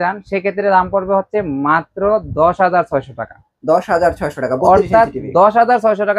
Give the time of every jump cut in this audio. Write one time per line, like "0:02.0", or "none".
none